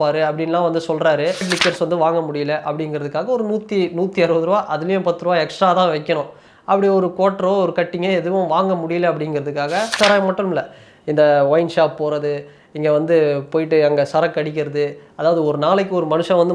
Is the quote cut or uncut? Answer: cut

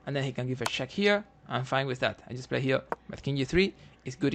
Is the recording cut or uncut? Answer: cut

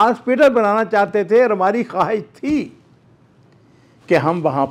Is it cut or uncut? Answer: uncut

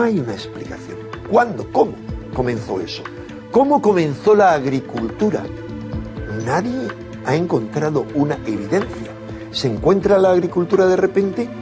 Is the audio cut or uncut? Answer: cut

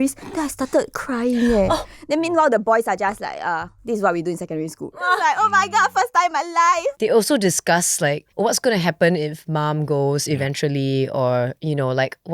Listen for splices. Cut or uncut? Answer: cut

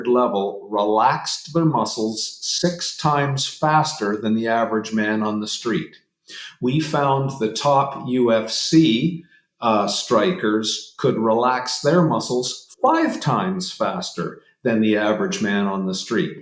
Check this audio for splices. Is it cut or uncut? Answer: uncut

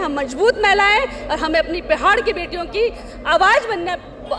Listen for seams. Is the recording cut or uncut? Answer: uncut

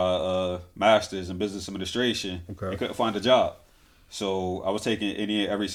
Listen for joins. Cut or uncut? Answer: uncut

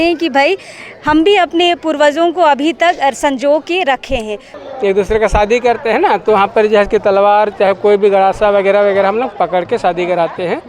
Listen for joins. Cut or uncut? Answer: cut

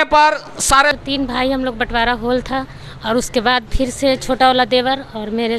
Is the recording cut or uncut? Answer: cut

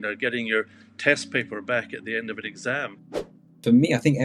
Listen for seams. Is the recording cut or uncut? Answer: cut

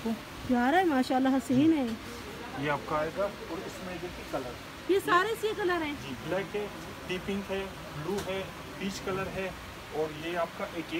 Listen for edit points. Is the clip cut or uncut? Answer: uncut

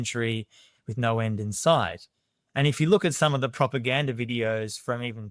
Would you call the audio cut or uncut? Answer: uncut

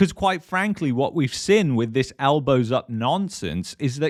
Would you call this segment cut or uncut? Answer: uncut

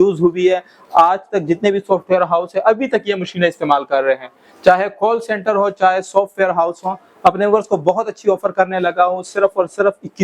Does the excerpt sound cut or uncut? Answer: uncut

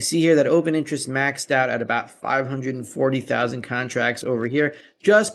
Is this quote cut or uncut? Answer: uncut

